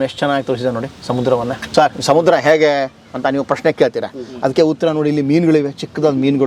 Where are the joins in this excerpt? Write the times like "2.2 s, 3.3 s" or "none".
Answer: 1.6 s